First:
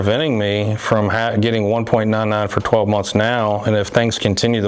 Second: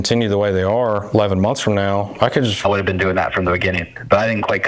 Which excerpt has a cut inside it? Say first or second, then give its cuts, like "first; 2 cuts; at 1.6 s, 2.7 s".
second; 1 cut; at 2.6 s